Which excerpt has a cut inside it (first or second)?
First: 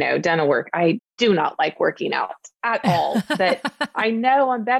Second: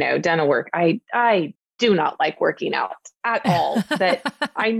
first